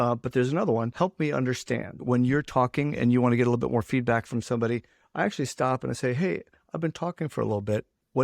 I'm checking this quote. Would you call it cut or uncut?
cut